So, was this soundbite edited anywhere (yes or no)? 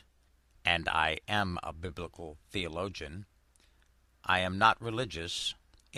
no